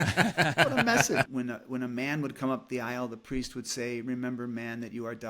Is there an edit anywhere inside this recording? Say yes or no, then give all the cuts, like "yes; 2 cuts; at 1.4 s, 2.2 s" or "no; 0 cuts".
yes; 1 cut; at 1.3 s